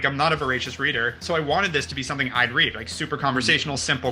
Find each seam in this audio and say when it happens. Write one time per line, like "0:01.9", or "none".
0:01.1